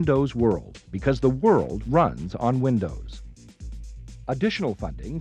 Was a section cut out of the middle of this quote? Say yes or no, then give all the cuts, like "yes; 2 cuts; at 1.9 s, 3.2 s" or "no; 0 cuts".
no; 0 cuts